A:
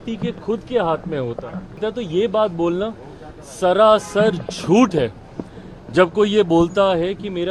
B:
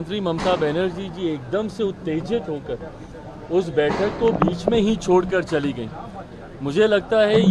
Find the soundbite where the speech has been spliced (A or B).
A